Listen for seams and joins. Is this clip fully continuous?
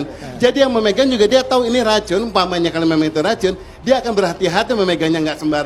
yes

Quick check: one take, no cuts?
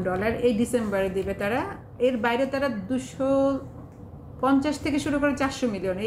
yes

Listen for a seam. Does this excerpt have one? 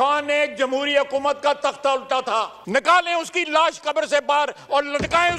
no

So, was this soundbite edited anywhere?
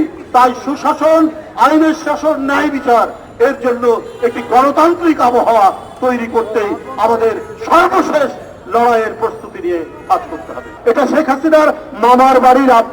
yes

